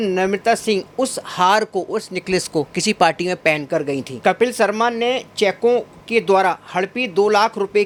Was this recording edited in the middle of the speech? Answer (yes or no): no